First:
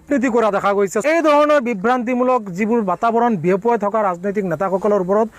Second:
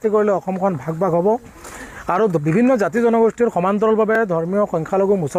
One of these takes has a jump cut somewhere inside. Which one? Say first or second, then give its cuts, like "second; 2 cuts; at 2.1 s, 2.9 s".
first; 1 cut; at 1.0 s